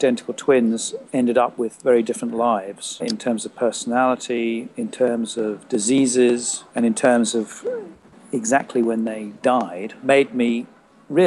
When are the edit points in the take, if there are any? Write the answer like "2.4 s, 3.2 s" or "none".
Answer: 0.9 s, 3.0 s, 4.7 s, 6.6 s, 10.0 s